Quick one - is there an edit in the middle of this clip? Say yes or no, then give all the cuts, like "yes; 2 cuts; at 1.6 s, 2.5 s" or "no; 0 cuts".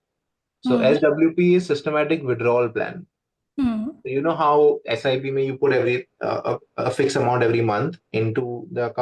no; 0 cuts